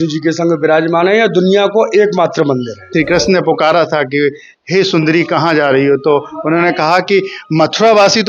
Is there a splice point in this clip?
yes; 1 cut; at 2.9 s

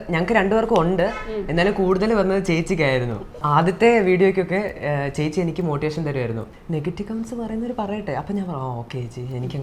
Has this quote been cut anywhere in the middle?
yes; 2 cuts; at 3.4 s, 6.5 s

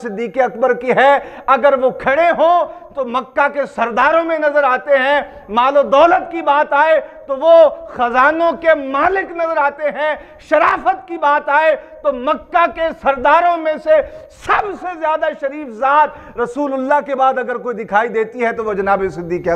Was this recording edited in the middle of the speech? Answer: no; 0 cuts

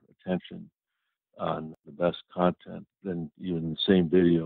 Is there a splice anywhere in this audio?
yes; 1 cut; at 1.8 s

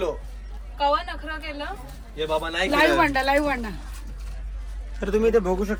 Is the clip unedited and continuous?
yes; 0 cuts

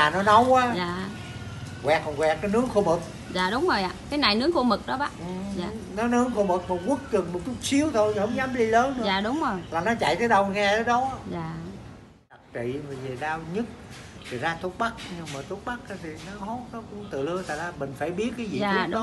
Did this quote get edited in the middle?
yes; 1 cut; at 12.4 s

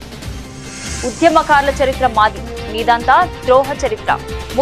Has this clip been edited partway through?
no; 0 cuts

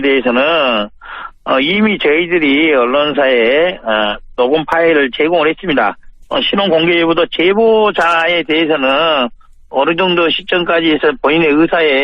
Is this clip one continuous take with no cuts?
no; 1 cut; at 2.9 s

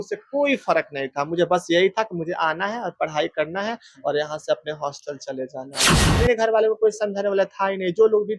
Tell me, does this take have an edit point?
yes; 1 cut; at 6.0 s

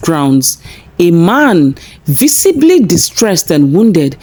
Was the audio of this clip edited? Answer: no; 0 cuts

